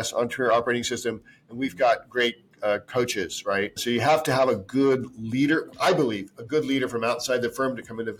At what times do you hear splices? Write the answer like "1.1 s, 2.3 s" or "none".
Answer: 3.8 s

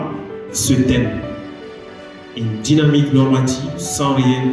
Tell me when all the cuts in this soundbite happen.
none

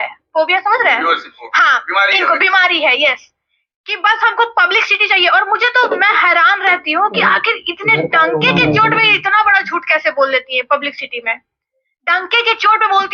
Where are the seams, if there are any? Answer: none

